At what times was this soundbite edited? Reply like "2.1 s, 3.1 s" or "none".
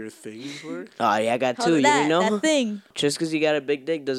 2.9 s